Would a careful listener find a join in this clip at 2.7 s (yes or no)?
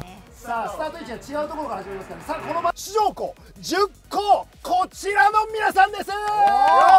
yes